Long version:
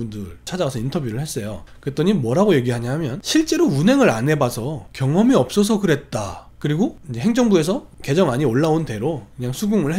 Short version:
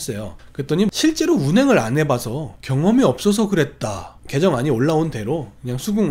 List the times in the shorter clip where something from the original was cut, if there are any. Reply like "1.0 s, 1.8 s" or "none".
1.0 s, 4.2 s